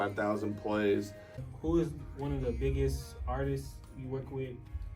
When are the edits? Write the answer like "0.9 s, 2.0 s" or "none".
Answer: 1.3 s